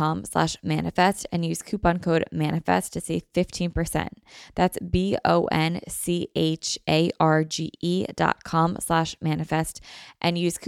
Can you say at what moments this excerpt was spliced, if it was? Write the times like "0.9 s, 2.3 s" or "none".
none